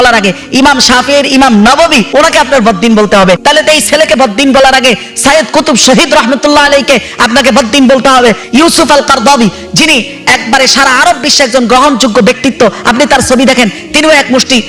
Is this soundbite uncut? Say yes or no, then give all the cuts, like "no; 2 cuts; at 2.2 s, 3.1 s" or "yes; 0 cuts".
no; 3 cuts; at 2.1 s, 3.4 s, 8.4 s